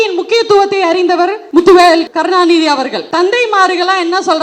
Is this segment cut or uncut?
cut